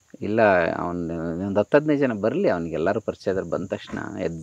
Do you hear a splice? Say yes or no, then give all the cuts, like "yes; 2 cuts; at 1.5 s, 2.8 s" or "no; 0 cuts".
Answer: no; 0 cuts